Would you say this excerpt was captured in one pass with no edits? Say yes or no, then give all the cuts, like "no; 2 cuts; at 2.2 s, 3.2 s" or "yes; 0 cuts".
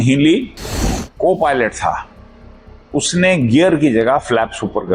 no; 1 cut; at 1.0 s